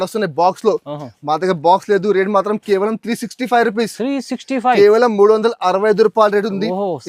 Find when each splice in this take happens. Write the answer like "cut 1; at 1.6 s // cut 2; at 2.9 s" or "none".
none